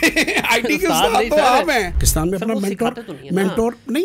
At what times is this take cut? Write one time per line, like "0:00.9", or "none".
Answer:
0:02.0